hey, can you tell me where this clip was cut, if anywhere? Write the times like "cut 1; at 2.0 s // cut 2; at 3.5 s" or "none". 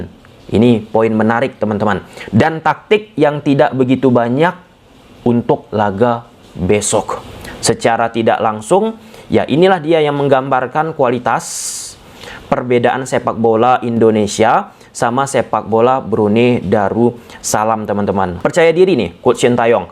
none